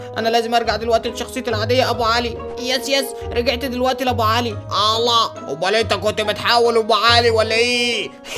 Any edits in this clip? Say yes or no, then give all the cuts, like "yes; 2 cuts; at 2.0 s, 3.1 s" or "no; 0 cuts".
no; 0 cuts